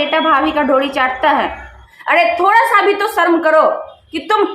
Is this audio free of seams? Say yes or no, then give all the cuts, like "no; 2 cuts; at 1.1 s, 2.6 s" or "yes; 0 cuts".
yes; 0 cuts